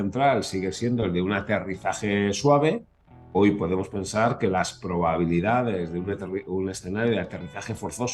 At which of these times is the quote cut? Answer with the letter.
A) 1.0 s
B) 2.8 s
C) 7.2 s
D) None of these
D